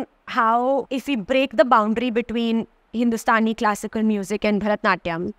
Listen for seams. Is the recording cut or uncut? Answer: cut